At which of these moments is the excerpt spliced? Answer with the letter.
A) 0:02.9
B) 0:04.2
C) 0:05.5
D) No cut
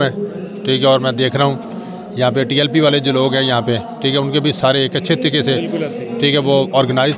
D